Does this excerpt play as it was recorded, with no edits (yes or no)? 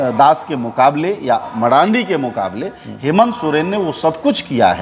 yes